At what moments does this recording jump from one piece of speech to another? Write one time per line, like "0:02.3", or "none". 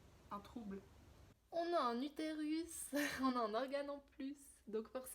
0:01.3